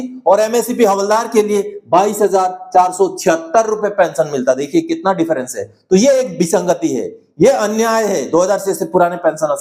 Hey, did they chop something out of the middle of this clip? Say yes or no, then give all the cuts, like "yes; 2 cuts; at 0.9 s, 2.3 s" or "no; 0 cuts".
no; 0 cuts